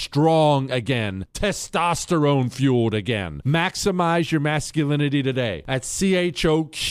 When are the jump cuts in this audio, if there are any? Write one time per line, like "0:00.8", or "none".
none

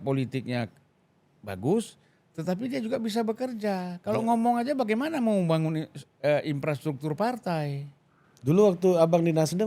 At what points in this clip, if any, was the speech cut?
none

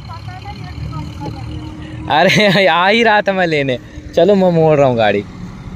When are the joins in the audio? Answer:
none

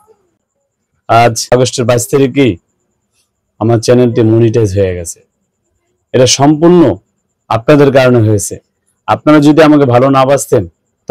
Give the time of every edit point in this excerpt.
0:01.5

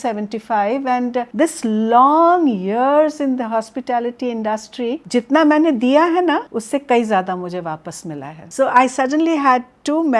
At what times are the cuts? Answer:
0:01.3
0:05.0
0:06.5
0:08.4

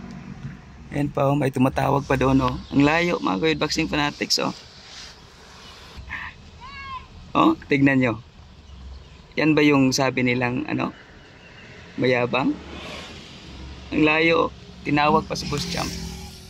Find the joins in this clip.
0:06.1

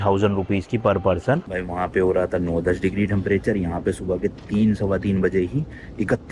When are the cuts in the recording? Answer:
0:01.5

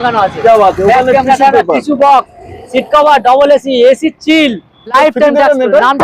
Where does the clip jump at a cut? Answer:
0:04.9

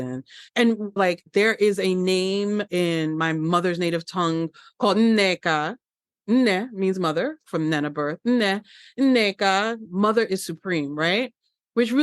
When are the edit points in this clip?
none

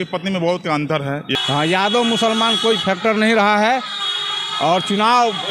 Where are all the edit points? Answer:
0:01.3

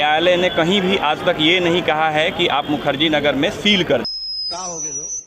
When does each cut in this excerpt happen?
0:04.1

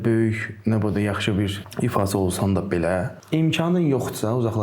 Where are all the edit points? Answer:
0:01.6
0:03.2

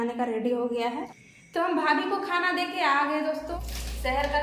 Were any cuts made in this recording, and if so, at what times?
0:01.1
0:03.5

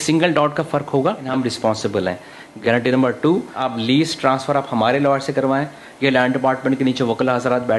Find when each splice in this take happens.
0:01.3
0:02.5
0:03.6

